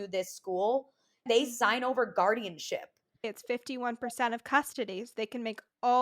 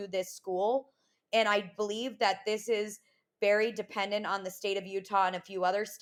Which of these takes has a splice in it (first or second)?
first